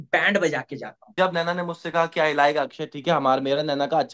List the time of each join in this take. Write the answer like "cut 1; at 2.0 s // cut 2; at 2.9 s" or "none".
cut 1; at 1.1 s